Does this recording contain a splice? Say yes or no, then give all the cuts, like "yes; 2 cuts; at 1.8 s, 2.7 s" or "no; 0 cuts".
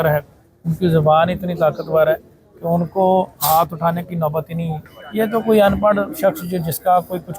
yes; 1 cut; at 4.8 s